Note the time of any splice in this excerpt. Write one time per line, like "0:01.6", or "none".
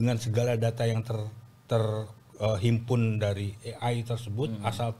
none